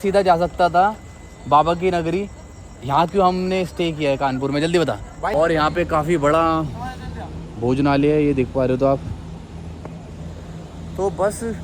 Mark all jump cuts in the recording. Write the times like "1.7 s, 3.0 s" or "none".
5.3 s